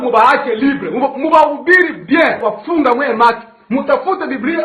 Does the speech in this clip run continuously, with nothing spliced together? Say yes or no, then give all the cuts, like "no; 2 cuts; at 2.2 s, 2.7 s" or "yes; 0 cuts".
no; 1 cut; at 2.4 s